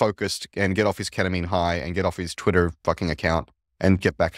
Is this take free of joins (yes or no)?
yes